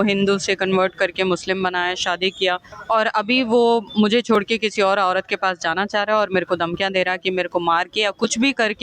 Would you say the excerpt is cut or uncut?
cut